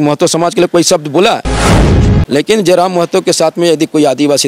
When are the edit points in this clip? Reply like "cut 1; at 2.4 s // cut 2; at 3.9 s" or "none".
cut 1; at 1.8 s